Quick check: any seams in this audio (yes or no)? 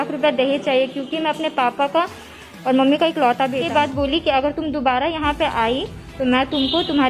yes